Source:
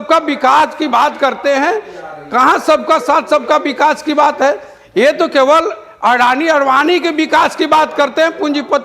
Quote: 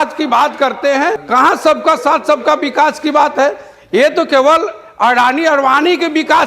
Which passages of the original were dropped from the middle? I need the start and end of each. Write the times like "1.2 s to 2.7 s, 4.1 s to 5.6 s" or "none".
1.8 s to 2.2 s